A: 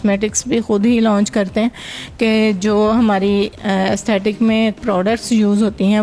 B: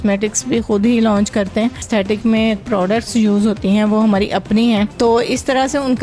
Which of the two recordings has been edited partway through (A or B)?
B